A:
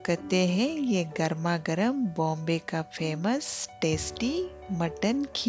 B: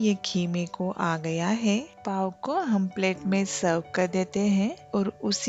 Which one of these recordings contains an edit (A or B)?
B